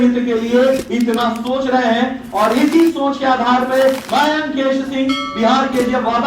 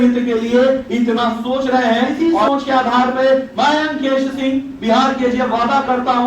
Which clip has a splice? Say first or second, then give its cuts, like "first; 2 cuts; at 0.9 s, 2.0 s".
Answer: second; 1 cut; at 2.2 s